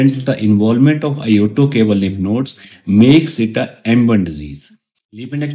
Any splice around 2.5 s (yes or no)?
no